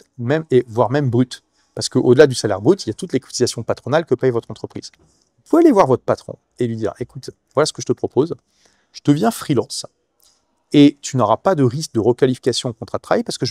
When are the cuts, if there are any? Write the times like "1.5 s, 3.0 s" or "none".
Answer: none